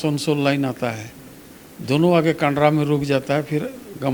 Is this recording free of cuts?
yes; 0 cuts

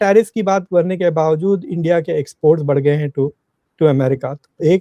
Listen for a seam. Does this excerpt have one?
no; 0 cuts

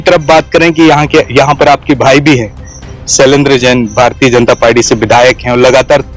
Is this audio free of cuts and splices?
yes; 0 cuts

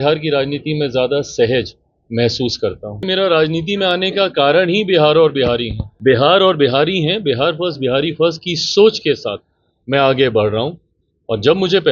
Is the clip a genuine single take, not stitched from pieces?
no; 2 cuts; at 3.0 s, 6.2 s

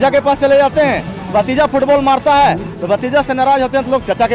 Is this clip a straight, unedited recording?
yes; 0 cuts

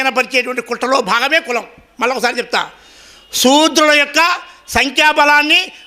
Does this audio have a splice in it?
no; 0 cuts

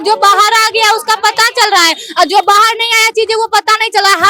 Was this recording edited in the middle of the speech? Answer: no; 0 cuts

